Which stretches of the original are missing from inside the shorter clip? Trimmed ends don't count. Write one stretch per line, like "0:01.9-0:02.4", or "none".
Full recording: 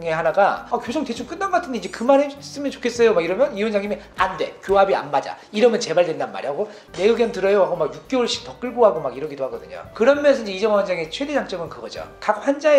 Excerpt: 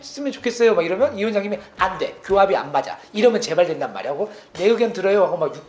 none